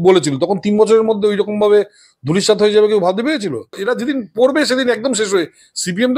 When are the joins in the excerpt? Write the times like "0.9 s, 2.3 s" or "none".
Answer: 3.8 s